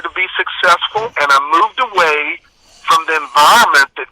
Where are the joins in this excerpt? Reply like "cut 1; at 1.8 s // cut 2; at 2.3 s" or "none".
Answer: cut 1; at 1.1 s

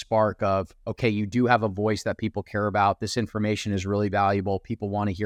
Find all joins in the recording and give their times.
none

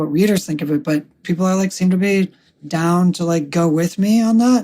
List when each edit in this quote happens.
cut 1; at 1.2 s

